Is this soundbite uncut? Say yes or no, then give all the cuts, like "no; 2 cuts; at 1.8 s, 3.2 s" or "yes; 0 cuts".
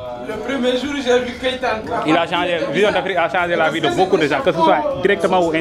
yes; 0 cuts